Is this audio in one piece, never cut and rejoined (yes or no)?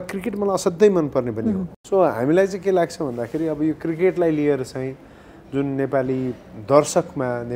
no